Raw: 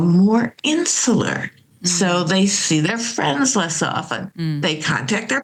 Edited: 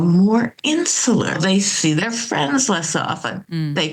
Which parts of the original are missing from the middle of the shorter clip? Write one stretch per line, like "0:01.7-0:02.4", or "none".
0:01.4-0:02.2